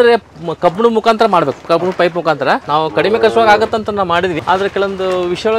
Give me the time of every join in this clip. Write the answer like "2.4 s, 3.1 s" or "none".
2.6 s, 4.4 s

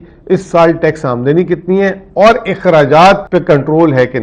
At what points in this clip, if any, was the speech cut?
3.2 s

